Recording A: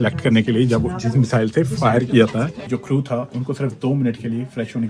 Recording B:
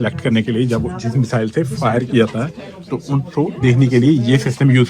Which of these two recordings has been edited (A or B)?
A